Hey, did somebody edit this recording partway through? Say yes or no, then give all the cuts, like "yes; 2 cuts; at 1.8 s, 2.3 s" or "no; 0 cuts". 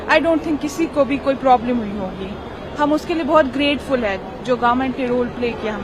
no; 0 cuts